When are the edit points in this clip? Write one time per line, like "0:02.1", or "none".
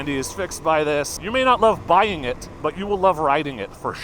0:01.2
0:02.5